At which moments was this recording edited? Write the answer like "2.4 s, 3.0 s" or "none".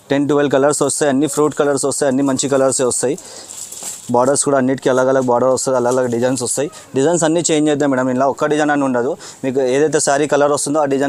none